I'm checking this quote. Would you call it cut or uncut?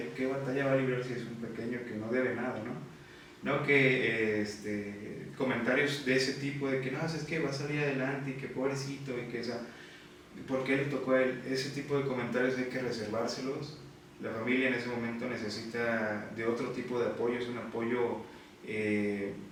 uncut